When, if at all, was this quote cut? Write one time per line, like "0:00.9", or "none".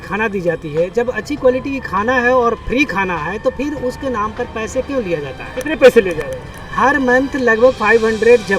none